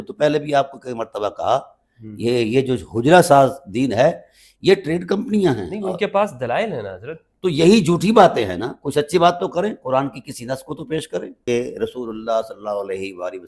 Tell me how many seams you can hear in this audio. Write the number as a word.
one